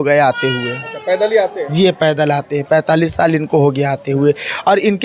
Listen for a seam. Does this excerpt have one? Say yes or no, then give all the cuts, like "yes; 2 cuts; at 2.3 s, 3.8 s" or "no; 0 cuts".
no; 0 cuts